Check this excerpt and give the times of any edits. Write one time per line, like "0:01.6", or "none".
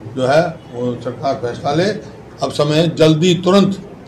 none